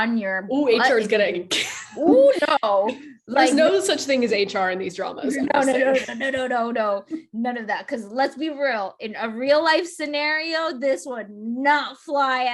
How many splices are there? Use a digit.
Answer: 0